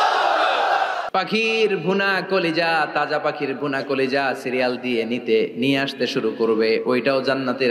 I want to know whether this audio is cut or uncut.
cut